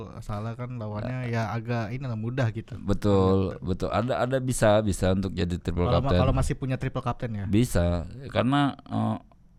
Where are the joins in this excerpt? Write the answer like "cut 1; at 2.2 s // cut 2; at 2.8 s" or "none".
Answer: none